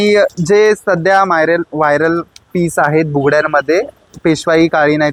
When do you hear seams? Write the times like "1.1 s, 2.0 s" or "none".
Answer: none